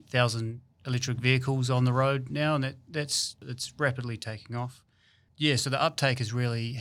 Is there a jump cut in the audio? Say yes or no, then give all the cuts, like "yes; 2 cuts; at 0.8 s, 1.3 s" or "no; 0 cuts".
yes; 1 cut; at 3.4 s